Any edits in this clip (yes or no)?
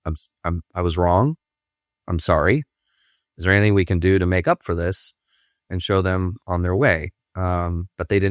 no